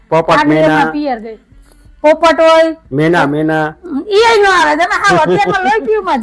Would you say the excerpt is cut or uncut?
uncut